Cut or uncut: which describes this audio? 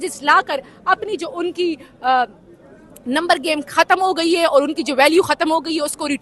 uncut